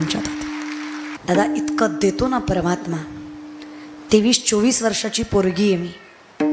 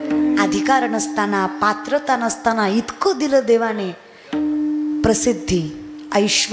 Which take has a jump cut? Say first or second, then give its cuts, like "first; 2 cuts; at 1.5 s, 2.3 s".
first; 1 cut; at 1.1 s